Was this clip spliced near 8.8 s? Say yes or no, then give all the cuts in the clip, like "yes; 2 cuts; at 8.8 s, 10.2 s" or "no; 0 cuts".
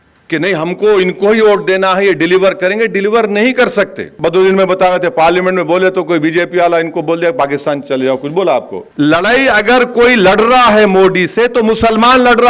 yes; 2 cuts; at 4.1 s, 8.8 s